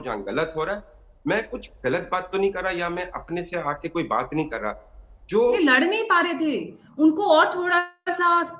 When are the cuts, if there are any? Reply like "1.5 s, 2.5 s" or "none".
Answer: 5.6 s